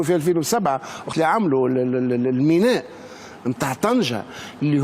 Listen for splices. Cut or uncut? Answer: cut